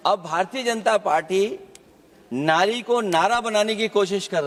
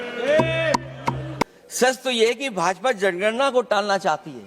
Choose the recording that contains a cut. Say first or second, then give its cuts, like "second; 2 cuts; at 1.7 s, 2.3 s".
second; 1 cut; at 1.6 s